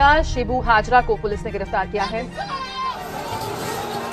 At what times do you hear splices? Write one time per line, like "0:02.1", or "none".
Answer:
0:02.7

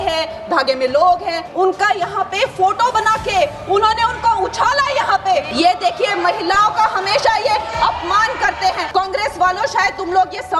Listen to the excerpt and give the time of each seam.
0:01.4
0:05.5
0:08.8

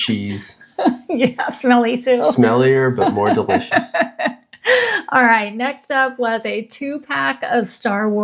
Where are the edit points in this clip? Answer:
none

